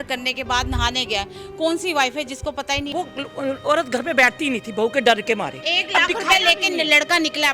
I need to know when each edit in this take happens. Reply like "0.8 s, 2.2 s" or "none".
2.9 s, 5.7 s